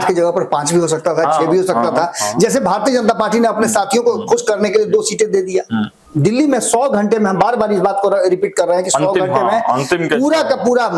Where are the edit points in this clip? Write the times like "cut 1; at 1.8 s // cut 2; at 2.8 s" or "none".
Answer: cut 1; at 6.0 s